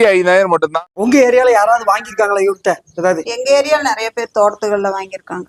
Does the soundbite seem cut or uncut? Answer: cut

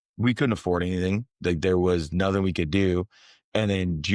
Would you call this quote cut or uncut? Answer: uncut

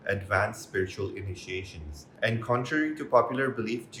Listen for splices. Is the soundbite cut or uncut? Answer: uncut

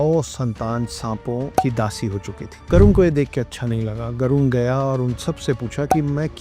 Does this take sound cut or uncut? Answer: cut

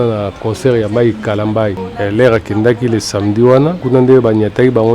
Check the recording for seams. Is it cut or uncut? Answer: cut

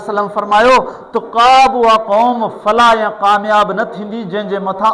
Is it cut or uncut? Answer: uncut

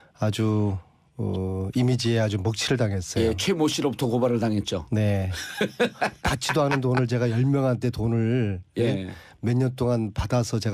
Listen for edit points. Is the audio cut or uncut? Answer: cut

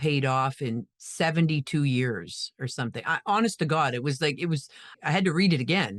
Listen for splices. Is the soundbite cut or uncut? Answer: uncut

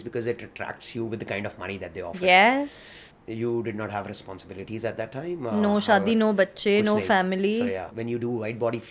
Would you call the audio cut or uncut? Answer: cut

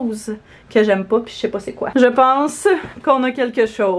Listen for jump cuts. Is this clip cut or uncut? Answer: uncut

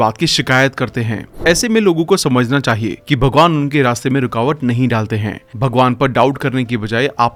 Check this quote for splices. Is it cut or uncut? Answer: uncut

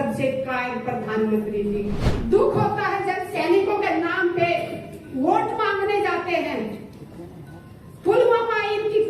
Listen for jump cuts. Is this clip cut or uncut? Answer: cut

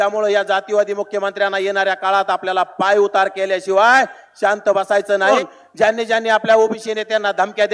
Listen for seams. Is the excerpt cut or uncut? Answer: cut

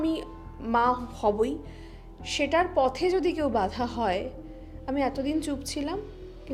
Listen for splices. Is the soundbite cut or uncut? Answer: uncut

